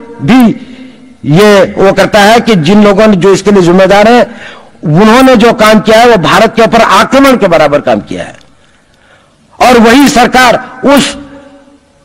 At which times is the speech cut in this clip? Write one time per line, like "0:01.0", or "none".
none